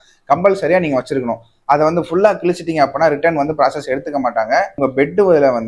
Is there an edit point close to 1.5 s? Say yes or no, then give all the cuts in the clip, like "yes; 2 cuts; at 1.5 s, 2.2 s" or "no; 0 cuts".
no; 1 cut; at 4.8 s